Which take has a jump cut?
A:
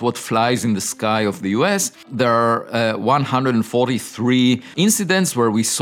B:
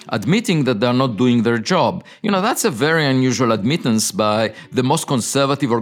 A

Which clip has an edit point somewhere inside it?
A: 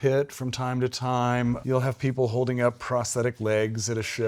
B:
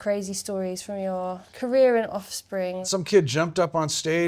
B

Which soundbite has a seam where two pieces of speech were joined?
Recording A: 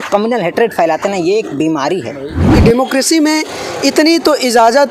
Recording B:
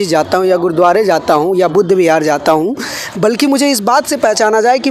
A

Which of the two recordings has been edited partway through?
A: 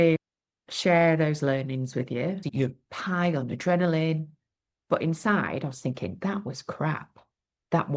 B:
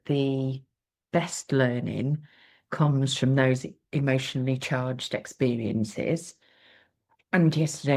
A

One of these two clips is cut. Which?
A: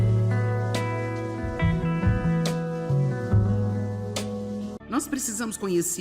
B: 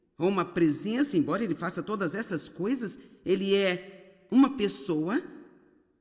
A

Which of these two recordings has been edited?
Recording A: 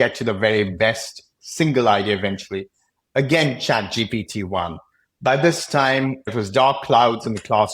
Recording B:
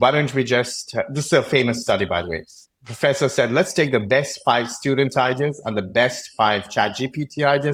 A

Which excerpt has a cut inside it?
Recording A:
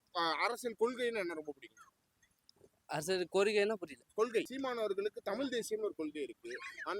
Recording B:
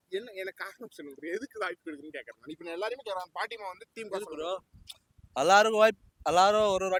A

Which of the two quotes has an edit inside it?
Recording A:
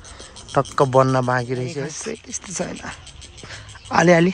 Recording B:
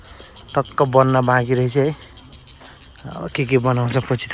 A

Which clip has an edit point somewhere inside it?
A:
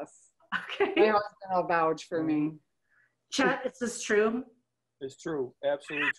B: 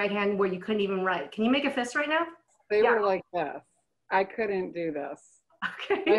B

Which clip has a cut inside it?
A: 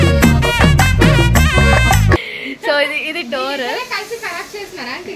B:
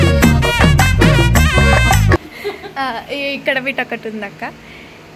B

